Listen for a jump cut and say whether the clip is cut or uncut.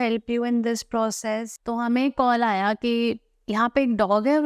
cut